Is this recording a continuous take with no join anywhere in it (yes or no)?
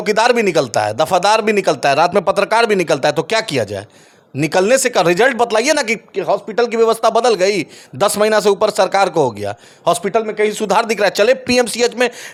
yes